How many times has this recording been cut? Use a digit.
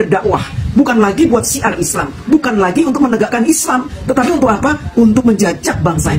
0